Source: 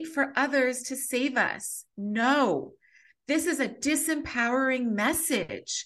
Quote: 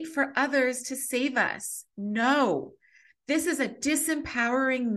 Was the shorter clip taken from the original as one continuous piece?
yes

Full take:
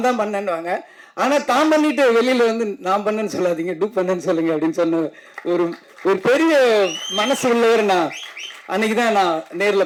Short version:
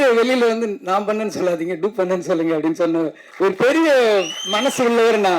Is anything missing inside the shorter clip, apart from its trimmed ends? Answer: yes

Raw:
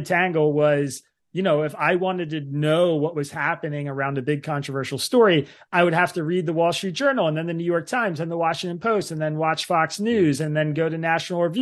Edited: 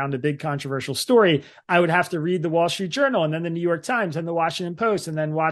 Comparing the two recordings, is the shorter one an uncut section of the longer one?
yes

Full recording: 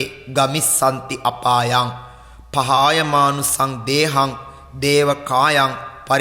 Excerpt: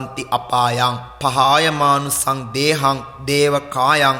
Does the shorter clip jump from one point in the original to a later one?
yes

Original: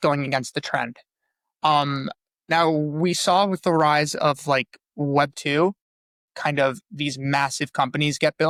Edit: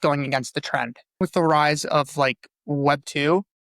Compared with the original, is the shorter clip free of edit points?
no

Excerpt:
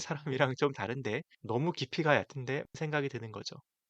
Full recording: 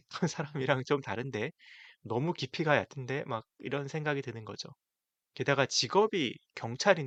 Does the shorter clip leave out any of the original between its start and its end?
yes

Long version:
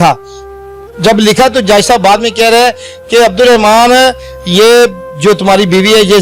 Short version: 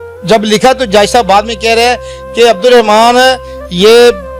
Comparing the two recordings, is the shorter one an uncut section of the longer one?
yes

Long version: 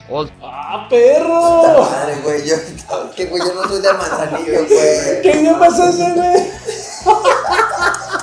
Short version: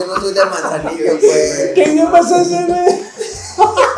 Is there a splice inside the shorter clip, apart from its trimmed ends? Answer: no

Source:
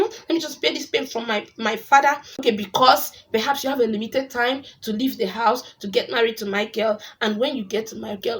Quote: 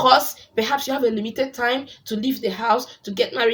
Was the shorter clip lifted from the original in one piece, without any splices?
yes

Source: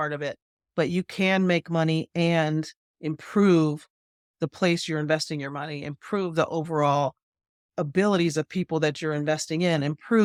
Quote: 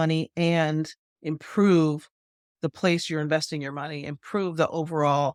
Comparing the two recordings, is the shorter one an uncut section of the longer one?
yes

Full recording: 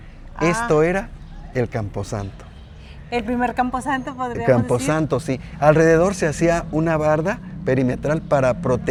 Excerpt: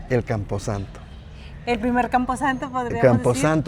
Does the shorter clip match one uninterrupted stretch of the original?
yes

